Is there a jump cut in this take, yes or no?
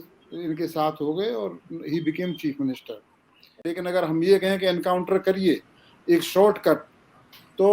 yes